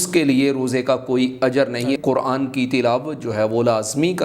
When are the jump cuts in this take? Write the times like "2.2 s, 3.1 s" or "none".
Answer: 2.0 s

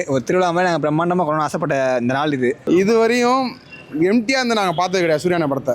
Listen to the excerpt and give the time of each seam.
2.6 s

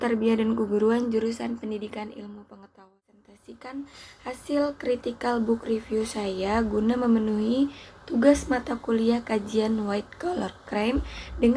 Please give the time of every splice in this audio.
2.8 s

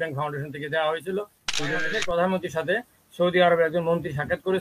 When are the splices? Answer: 1.8 s

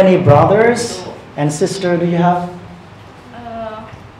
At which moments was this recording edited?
none

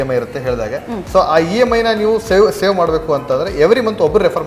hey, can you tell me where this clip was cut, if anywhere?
none

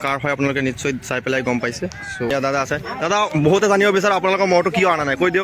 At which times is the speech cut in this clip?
2.3 s

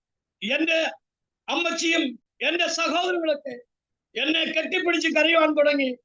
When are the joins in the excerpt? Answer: 2.3 s

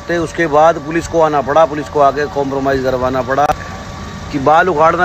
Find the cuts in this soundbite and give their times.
3.5 s

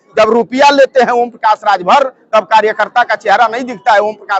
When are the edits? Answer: none

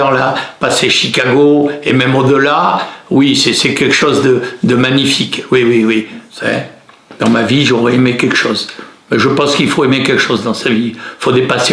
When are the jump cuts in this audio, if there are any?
6.2 s

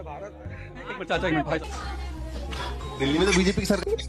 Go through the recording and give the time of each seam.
1.7 s

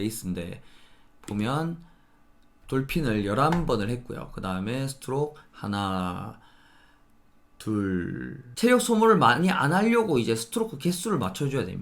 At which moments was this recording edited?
8.5 s

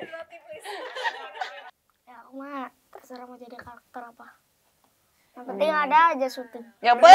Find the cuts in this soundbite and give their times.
1.6 s

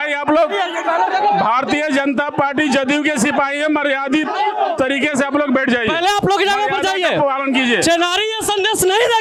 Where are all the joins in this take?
none

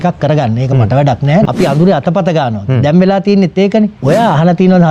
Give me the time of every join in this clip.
1.5 s, 4.0 s

